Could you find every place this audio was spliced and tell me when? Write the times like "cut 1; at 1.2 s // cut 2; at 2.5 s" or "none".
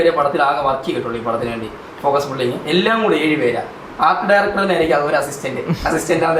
none